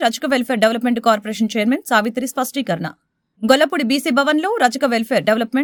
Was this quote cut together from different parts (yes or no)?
no